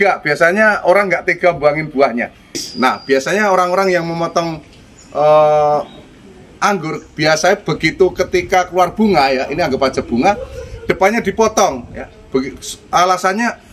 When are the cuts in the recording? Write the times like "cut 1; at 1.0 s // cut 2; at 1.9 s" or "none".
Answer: cut 1; at 2.7 s